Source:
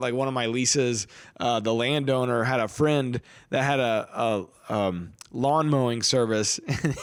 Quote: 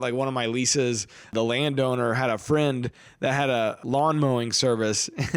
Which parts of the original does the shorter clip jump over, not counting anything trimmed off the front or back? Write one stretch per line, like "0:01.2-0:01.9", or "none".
0:01.3-0:01.6
0:04.1-0:05.3